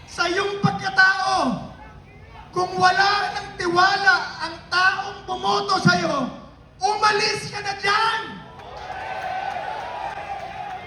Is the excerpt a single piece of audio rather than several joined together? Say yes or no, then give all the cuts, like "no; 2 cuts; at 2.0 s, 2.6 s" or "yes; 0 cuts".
yes; 0 cuts